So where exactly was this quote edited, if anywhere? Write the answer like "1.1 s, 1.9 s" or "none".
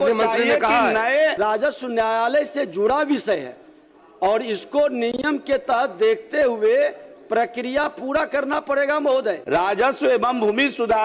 1.3 s, 9.4 s